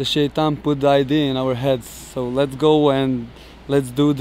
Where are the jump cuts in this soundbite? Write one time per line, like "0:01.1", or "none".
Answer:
none